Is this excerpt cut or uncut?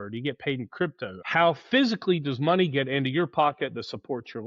cut